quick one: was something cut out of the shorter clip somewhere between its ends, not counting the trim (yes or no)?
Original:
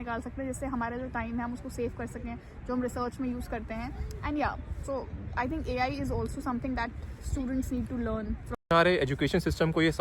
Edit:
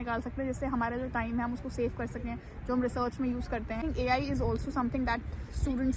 yes